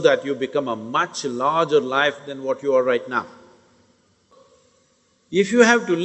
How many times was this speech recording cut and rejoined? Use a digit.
1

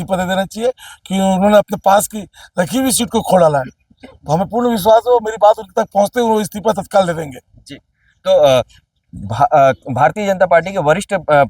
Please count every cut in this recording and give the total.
0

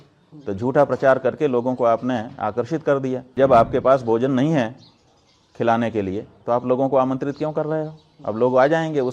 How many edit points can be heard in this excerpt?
1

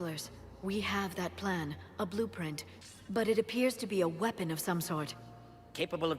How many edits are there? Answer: 1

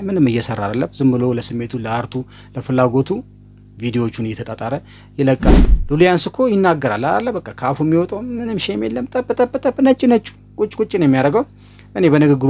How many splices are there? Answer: 1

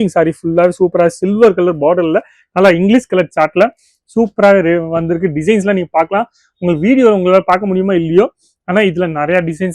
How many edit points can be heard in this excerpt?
0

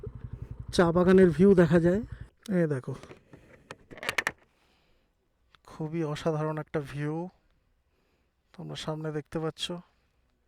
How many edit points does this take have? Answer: 1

